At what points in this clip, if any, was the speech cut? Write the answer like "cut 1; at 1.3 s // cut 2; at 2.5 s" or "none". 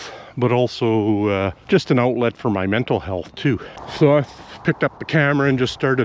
cut 1; at 1.6 s // cut 2; at 3.8 s